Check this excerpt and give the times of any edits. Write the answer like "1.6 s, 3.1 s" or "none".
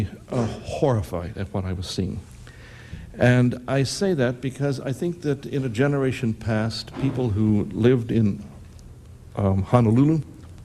1.1 s